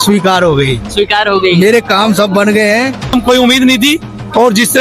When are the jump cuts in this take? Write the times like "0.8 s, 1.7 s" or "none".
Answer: 3.1 s